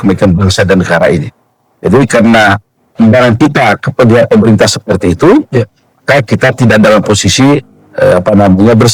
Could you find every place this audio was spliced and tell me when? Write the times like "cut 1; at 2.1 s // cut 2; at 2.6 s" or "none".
none